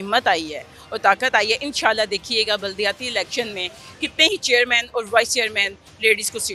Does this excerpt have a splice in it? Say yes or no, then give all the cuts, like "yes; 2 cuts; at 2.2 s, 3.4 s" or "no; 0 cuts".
no; 0 cuts